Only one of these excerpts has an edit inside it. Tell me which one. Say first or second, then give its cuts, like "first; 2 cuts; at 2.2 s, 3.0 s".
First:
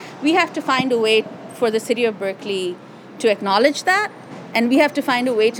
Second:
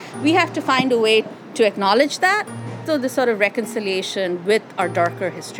second; 2 cuts; at 1.4 s, 2.8 s